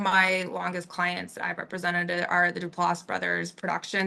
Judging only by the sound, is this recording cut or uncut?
uncut